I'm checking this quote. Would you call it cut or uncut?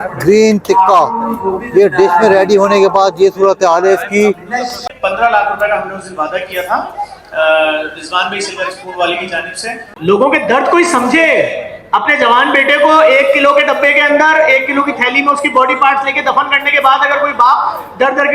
cut